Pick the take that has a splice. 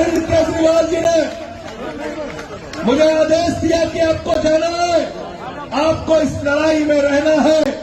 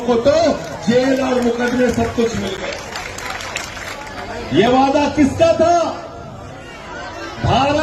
second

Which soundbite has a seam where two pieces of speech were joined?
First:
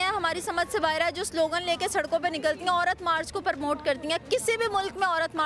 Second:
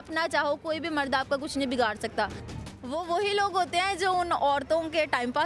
second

